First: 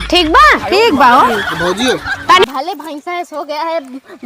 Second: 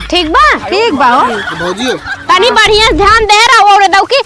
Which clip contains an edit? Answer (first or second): first